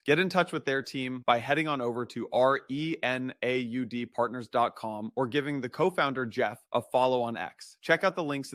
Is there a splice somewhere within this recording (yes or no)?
no